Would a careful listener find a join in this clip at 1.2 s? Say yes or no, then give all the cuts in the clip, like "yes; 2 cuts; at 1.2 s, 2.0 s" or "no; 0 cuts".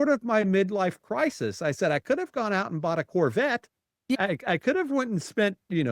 no; 1 cut; at 4.2 s